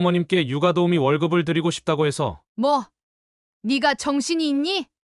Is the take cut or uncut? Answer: uncut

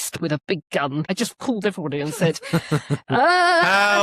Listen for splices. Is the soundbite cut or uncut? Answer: cut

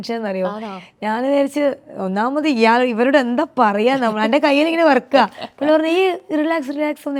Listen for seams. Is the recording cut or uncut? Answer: uncut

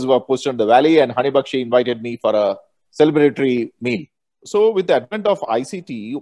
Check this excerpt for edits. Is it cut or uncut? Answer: cut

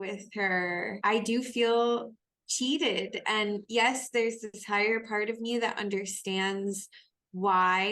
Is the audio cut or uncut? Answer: uncut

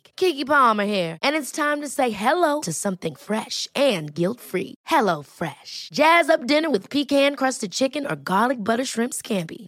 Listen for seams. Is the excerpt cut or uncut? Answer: uncut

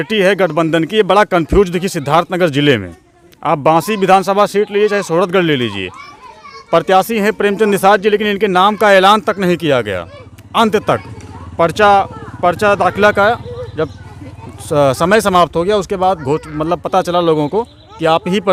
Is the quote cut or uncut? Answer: uncut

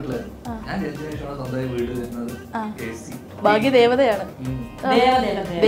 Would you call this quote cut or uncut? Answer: cut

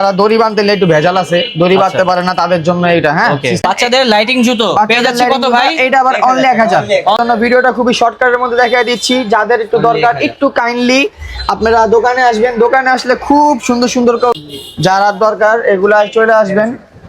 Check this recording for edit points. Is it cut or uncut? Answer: cut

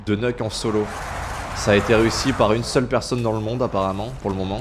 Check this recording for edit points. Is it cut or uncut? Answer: uncut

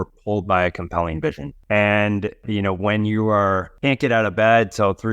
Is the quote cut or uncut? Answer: cut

